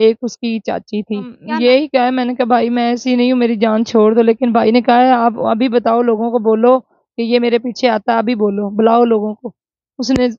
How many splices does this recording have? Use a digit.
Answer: 1